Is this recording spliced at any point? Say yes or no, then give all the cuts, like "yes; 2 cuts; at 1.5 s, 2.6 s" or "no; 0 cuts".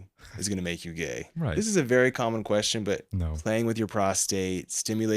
yes; 2 cuts; at 1.3 s, 3.2 s